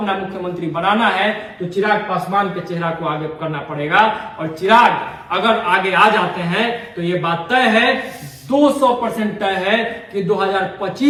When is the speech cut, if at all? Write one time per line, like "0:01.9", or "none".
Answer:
none